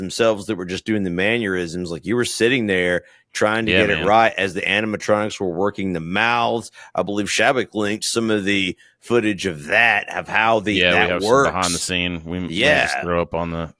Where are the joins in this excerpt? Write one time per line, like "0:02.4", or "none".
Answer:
none

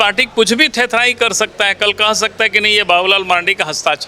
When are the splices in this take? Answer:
none

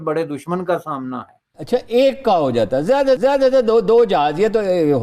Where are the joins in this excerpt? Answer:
0:01.6

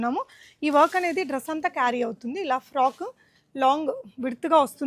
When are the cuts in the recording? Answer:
none

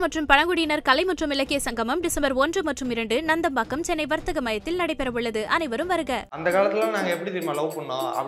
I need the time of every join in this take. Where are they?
0:06.3

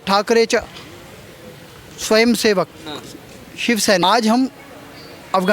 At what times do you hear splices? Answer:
0:04.0

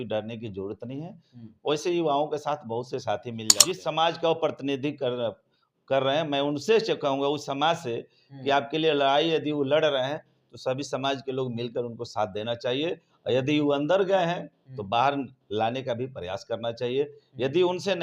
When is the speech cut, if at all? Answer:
0:03.5

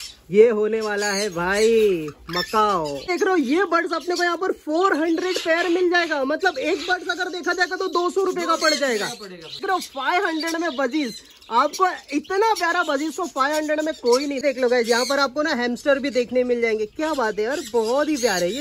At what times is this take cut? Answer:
0:03.1
0:09.6
0:14.4

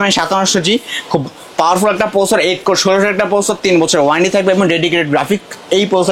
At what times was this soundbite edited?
none

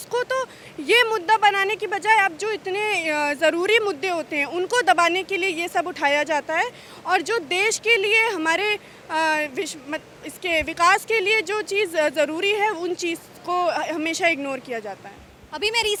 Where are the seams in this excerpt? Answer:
none

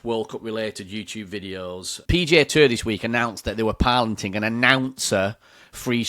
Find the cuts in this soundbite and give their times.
0:01.9

